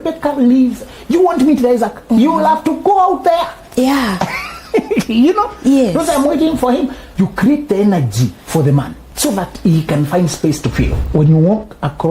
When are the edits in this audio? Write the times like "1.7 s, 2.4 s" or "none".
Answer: 7.1 s, 9.0 s, 11.0 s